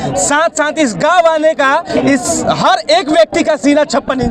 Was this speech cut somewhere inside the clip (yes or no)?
no